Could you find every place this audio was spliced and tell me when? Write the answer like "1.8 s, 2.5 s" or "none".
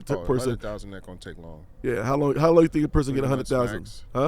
none